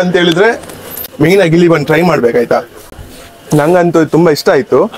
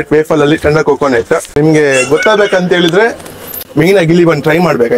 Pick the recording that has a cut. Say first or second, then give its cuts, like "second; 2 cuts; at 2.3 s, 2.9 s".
second; 1 cut; at 1.5 s